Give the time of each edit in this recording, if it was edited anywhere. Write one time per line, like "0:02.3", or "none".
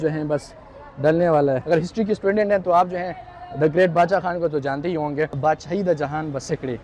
0:01.6
0:05.4